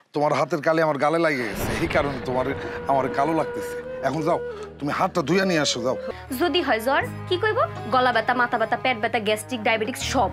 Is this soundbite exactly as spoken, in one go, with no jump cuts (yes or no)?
no